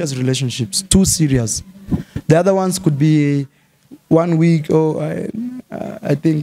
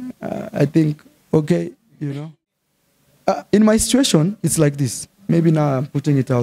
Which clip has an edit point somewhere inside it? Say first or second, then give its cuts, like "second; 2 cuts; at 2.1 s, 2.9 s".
second; 1 cut; at 2.2 s